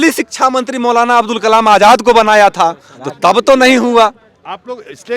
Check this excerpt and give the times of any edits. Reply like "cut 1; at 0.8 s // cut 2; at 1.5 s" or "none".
none